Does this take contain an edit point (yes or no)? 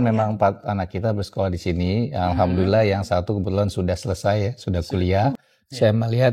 yes